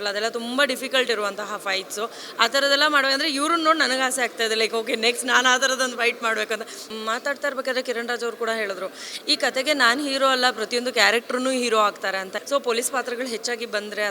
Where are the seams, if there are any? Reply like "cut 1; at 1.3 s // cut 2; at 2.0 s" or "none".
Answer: cut 1; at 6.8 s // cut 2; at 12.3 s